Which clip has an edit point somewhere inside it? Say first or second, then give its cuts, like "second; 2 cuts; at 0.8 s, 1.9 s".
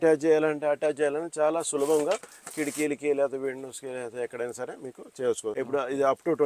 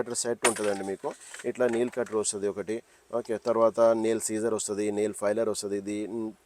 first; 1 cut; at 5.5 s